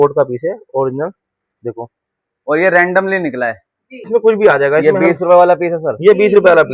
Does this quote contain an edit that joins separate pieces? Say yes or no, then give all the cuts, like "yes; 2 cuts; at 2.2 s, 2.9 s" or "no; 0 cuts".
yes; 1 cut; at 4.1 s